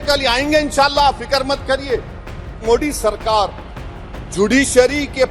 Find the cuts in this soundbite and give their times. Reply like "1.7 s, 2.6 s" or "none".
2.6 s

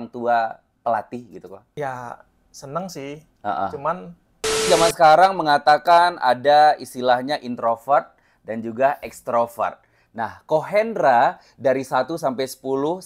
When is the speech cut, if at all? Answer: 1.6 s, 4.7 s

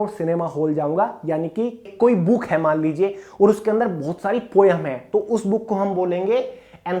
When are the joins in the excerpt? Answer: 1.9 s

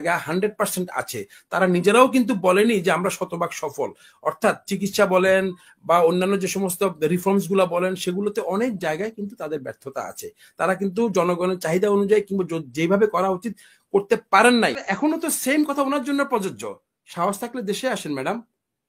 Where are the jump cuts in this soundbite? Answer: 14.8 s

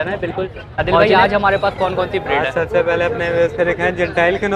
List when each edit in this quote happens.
1.0 s

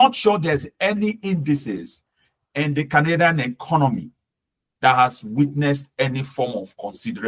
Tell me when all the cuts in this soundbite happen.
none

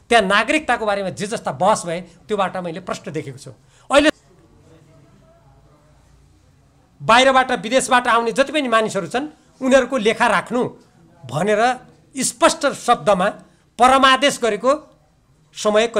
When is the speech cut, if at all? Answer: 4.2 s

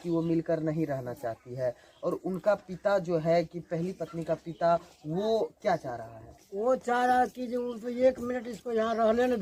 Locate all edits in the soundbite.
none

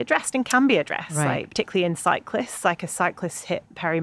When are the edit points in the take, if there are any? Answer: 1.5 s

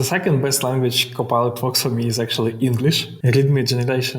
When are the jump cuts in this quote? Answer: 3.1 s

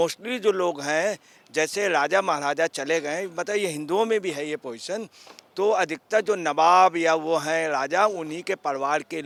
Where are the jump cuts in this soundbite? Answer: none

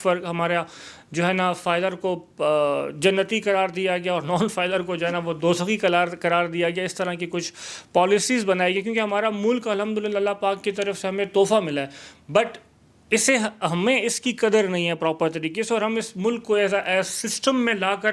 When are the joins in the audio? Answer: none

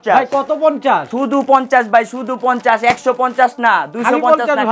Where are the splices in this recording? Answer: 1.1 s

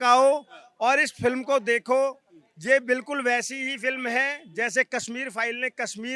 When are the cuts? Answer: none

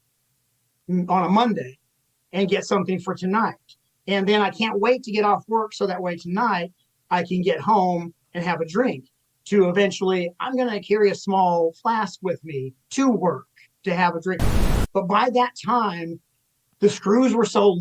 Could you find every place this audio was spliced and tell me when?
14.7 s

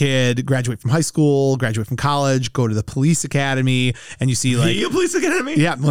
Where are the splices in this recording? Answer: none

